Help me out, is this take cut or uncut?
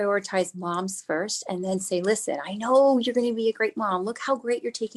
uncut